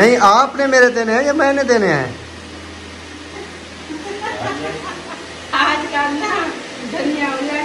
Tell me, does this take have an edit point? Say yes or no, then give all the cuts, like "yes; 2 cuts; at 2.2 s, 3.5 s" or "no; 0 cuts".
no; 0 cuts